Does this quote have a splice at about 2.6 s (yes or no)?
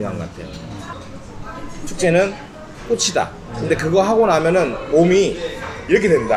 no